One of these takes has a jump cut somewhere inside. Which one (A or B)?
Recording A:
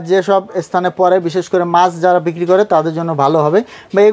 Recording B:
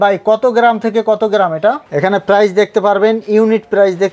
B